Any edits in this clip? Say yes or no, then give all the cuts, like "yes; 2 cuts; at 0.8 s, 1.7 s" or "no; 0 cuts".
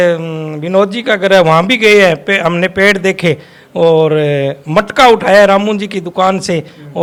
no; 0 cuts